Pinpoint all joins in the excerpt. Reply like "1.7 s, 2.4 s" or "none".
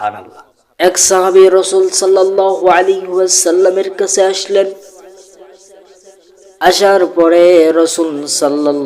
1.0 s